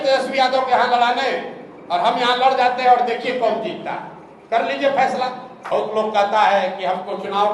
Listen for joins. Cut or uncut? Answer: cut